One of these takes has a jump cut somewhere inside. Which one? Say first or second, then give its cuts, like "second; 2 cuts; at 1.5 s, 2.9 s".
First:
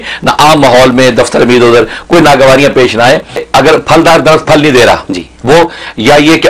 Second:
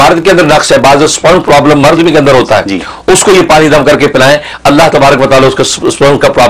first; 1 cut; at 3.5 s